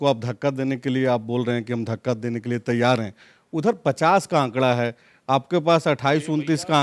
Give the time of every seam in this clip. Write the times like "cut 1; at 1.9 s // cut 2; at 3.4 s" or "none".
none